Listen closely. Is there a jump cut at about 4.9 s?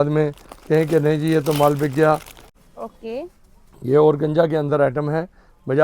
no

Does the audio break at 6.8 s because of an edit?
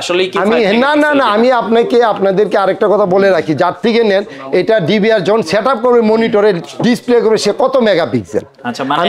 no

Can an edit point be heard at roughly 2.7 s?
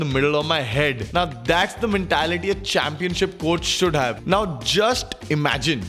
no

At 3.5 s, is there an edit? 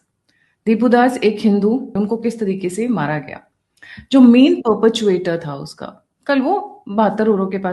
no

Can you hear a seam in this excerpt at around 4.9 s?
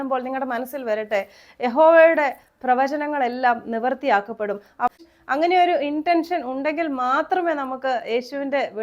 yes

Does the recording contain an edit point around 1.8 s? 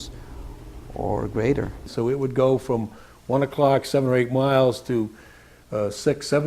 yes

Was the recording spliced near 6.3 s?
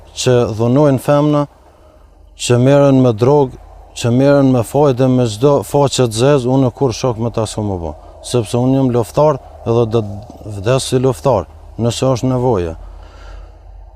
no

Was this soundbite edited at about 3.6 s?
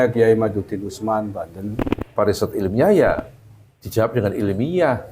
no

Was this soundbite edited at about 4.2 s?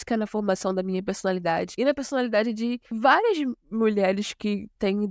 no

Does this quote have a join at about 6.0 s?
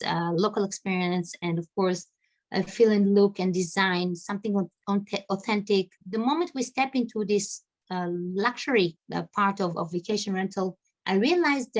yes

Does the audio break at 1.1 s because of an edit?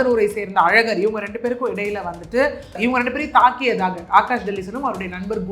no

